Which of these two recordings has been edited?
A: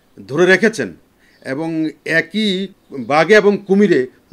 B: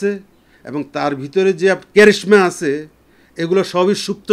A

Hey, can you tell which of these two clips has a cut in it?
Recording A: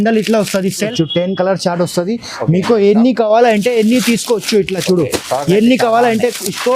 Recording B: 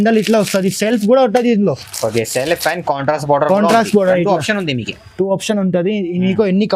A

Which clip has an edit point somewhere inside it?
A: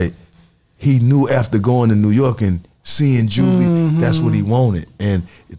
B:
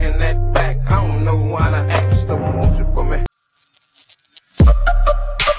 B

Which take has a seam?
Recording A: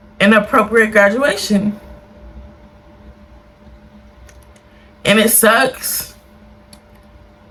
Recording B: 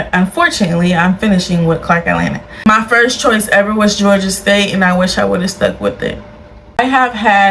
B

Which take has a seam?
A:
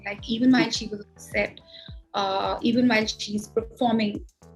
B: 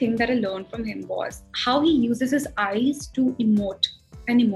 B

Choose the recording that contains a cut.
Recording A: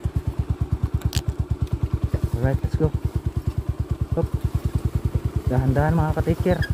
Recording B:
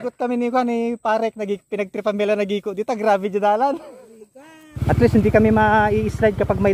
B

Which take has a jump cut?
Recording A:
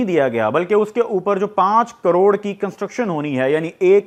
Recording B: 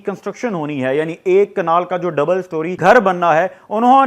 B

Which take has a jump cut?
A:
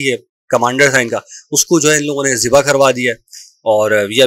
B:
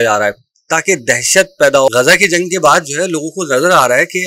B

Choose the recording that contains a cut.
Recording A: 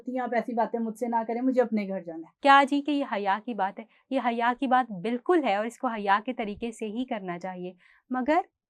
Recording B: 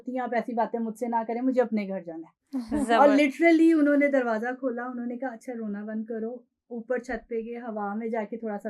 A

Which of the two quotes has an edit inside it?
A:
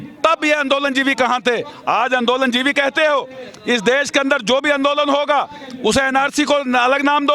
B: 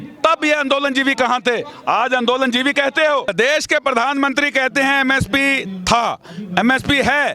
B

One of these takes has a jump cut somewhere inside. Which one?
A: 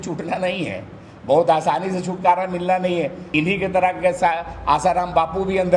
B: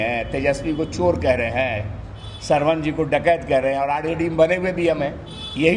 A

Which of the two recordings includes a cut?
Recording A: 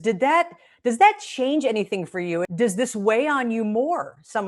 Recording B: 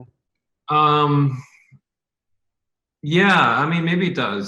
A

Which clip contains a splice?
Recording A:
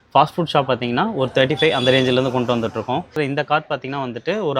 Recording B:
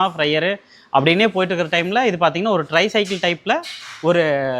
A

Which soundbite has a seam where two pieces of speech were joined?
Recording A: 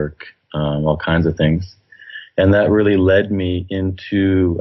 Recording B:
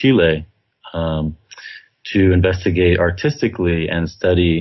B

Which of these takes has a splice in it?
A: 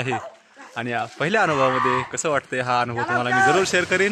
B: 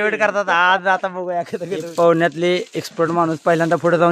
B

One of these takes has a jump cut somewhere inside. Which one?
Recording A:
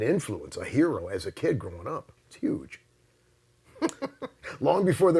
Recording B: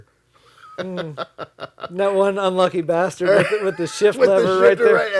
A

